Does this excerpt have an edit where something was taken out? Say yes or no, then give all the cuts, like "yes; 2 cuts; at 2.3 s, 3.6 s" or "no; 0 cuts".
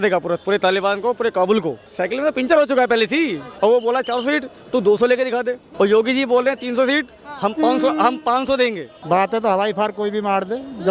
yes; 4 cuts; at 1.9 s, 3.5 s, 5.6 s, 8.9 s